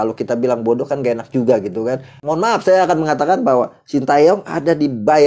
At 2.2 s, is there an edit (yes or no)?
yes